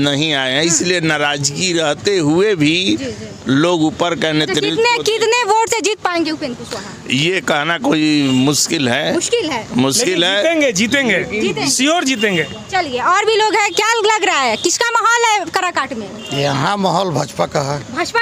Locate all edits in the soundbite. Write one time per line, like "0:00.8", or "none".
none